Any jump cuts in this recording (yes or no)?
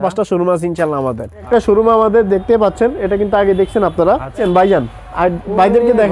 yes